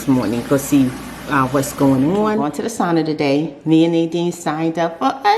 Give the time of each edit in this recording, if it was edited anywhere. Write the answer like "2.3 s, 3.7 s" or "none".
2.5 s